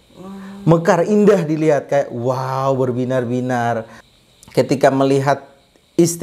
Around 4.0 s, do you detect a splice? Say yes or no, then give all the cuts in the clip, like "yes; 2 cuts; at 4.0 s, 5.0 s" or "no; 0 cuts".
yes; 1 cut; at 4.0 s